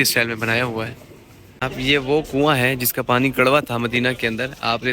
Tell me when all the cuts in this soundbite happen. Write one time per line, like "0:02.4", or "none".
0:01.6